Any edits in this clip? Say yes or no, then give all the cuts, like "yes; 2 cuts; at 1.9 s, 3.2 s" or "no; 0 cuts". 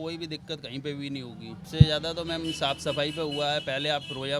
yes; 1 cut; at 1.6 s